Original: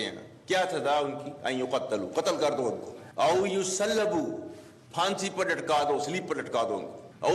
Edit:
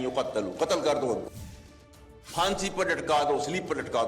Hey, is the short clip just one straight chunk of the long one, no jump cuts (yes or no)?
no